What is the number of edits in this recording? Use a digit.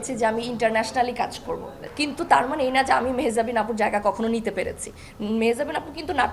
1